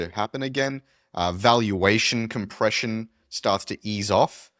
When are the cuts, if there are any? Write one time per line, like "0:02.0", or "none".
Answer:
none